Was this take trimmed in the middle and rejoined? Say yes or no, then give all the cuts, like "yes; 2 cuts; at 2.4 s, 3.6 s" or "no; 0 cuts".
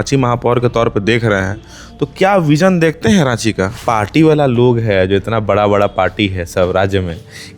yes; 1 cut; at 3.8 s